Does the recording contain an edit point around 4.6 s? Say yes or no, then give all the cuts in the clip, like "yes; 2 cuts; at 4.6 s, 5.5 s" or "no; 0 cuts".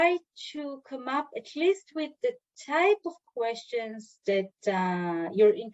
no; 0 cuts